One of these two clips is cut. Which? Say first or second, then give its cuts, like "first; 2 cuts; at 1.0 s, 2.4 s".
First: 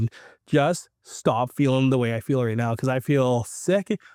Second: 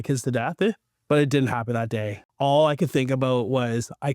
second; 1 cut; at 2.2 s